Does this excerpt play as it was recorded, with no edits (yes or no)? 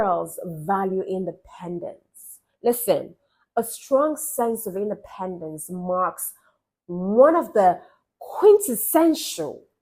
yes